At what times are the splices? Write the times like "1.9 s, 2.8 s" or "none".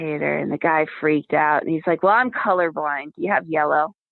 none